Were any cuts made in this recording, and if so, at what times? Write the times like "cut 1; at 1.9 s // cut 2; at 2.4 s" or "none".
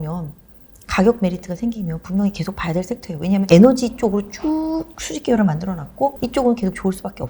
cut 1; at 3.4 s // cut 2; at 6.2 s